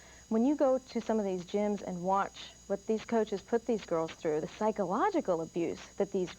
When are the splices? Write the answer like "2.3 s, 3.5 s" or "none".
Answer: 4.5 s